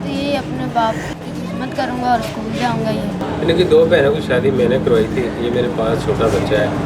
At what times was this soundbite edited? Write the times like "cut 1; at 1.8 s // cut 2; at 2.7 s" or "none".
cut 1; at 3.2 s

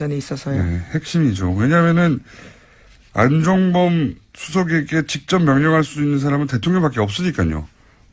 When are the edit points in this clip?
none

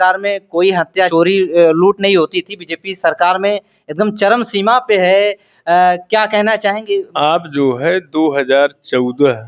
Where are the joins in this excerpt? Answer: cut 1; at 1.1 s // cut 2; at 7.1 s

